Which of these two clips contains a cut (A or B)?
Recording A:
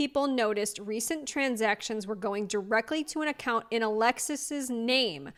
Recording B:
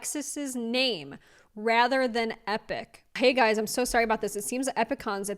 B